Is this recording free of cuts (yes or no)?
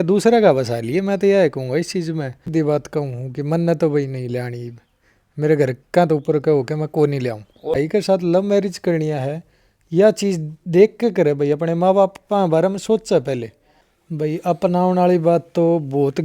no